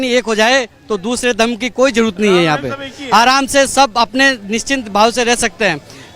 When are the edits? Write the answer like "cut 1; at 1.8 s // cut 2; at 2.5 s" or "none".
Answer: none